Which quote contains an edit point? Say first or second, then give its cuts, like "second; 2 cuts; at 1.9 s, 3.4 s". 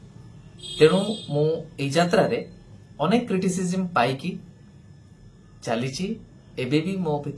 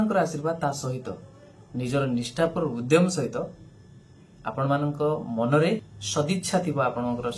second; 1 cut; at 6.0 s